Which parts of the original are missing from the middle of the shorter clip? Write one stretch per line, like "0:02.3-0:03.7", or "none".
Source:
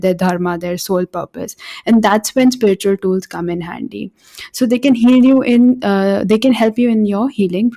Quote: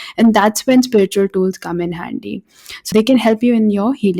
0:04.5-0:06.2

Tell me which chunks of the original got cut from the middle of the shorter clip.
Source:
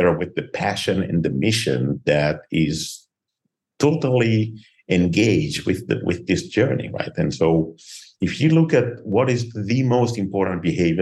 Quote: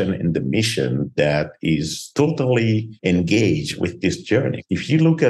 0:02.9-0:03.6
0:04.5-0:04.8
0:06.0-0:07.6

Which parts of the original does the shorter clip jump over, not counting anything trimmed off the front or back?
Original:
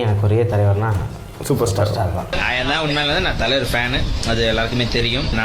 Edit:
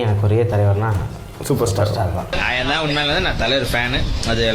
none

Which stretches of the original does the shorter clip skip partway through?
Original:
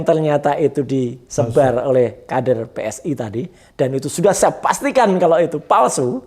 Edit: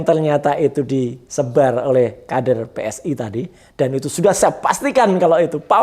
none

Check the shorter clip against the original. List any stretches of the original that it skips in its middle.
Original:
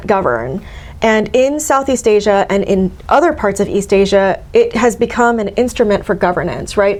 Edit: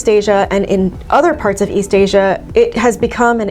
none

